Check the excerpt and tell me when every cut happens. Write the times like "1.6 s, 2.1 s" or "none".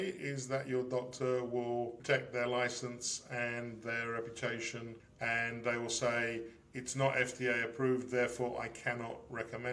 2.0 s, 5.0 s